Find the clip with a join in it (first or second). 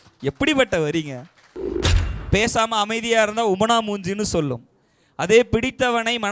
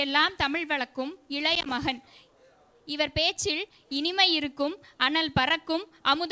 first